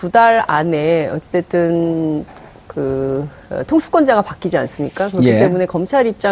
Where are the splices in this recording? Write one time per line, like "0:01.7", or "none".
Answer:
none